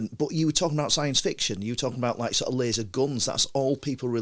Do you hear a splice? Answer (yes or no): no